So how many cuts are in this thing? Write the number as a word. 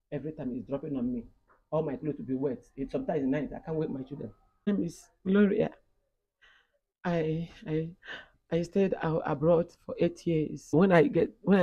two